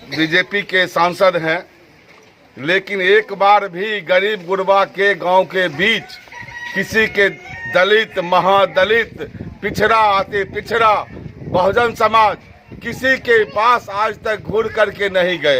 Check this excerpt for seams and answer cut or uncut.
uncut